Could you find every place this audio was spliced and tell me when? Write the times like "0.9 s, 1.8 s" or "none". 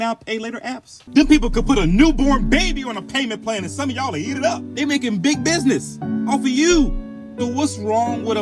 0.9 s, 4.7 s